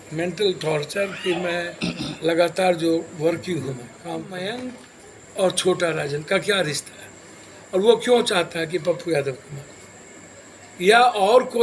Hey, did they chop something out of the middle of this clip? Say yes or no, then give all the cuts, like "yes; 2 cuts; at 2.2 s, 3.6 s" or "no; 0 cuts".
yes; 1 cut; at 4.3 s